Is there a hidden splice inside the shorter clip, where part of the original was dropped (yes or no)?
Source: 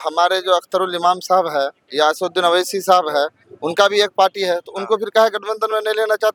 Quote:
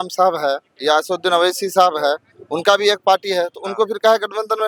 no